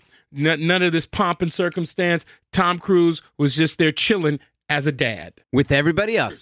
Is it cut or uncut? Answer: cut